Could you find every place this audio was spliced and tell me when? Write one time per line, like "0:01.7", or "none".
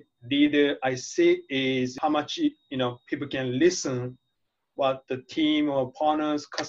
none